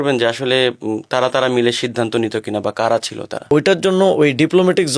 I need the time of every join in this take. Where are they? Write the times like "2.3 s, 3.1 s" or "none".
3.4 s